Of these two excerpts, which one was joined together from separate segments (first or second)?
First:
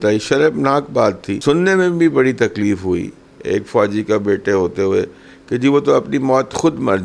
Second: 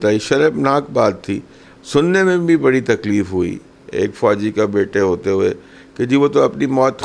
first